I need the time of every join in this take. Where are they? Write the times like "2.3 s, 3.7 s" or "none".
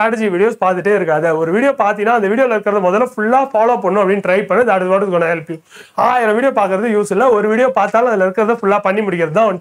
none